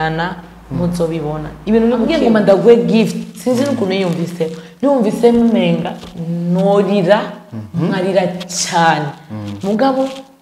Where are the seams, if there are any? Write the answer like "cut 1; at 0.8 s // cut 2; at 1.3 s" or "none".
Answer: cut 1; at 2.1 s